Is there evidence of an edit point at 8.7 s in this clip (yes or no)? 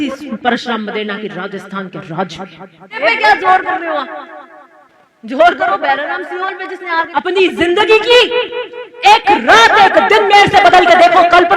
no